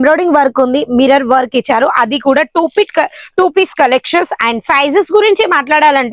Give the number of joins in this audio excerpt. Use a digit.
0